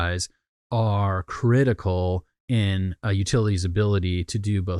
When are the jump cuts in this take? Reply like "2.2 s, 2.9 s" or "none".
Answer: none

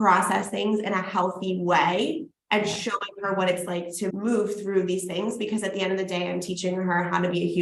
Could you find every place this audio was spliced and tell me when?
none

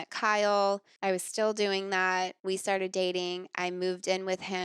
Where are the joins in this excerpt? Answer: 0.9 s, 2.4 s

